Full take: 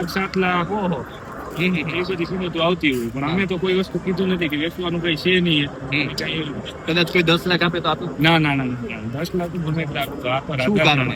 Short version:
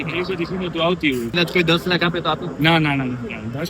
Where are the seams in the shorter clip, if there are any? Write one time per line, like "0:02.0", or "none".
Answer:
0:01.3

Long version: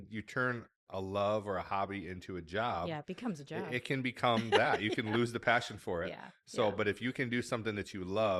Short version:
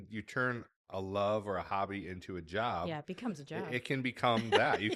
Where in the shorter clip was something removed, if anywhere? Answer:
none

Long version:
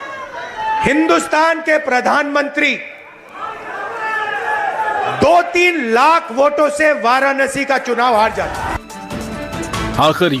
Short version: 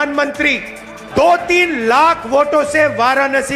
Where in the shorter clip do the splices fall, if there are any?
0:01.1

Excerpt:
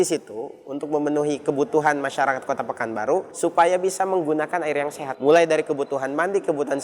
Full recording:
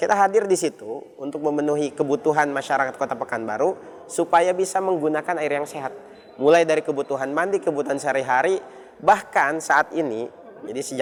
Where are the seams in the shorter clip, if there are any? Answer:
0:03.3
0:05.0

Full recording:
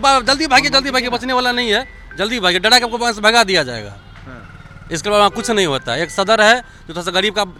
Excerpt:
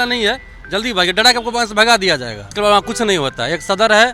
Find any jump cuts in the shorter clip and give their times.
0:02.4

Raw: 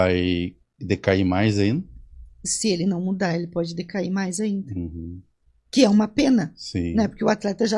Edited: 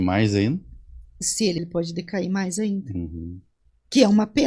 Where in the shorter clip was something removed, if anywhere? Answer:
0:01.6

